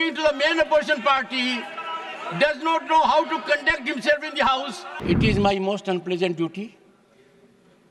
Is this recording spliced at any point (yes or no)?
yes